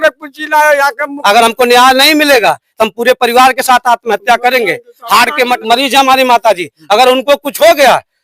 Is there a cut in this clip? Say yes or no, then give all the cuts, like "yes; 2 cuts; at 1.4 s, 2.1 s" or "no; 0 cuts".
yes; 2 cuts; at 1.1 s, 5.6 s